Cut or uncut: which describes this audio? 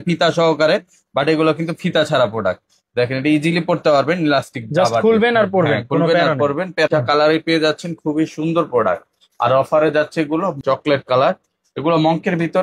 cut